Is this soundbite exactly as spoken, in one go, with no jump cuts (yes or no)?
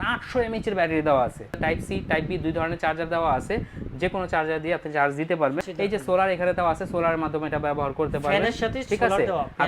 no